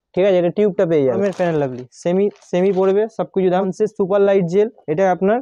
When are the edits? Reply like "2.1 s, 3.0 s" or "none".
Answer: 1.2 s, 3.7 s